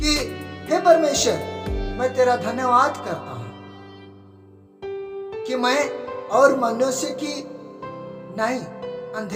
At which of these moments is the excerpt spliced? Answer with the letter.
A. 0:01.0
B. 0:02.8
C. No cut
C